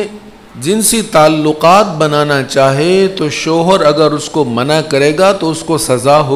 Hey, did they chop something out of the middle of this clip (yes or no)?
no